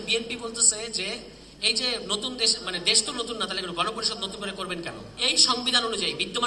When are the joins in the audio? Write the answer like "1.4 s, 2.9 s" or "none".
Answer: 5.1 s